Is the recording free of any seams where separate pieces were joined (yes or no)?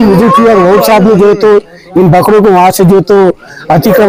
yes